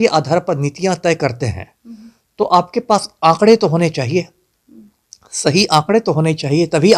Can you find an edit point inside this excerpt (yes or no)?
no